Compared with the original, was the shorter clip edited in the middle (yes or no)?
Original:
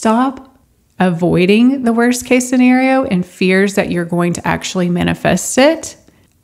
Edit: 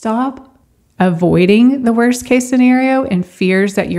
no